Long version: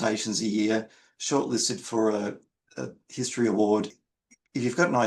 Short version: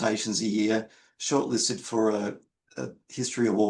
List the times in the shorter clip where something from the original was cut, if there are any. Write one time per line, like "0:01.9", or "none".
none